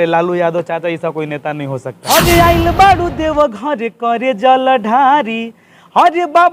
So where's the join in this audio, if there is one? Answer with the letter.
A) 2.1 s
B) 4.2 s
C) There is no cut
A